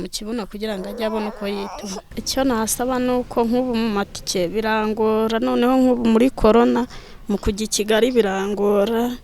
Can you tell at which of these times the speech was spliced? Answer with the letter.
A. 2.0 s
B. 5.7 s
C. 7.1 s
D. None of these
A